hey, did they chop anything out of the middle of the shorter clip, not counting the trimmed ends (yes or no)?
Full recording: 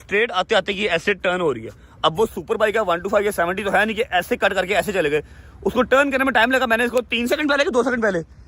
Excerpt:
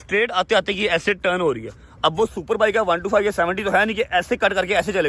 no